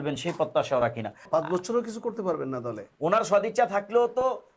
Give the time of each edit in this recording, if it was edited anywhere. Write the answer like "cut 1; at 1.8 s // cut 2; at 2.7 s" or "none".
cut 1; at 1.2 s // cut 2; at 2.9 s